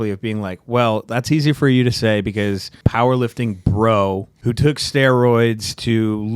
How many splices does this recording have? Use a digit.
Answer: 2